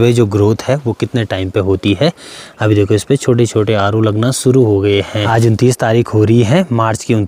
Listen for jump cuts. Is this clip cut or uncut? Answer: uncut